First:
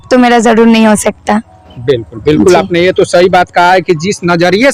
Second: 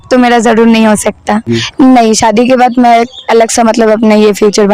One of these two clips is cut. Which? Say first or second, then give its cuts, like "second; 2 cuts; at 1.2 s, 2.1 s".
second; 1 cut; at 1.6 s